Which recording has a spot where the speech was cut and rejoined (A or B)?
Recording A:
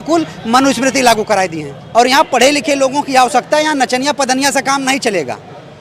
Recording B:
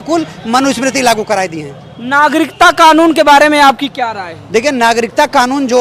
A